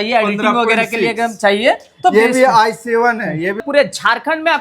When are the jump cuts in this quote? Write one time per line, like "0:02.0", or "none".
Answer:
0:03.6